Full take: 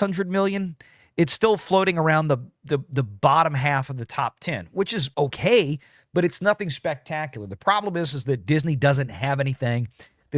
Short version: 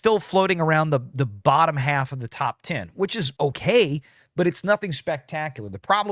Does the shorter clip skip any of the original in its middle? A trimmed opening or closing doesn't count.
yes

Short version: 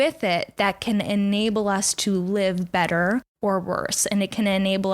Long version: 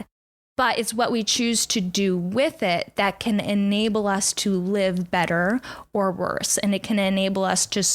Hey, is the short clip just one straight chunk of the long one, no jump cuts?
no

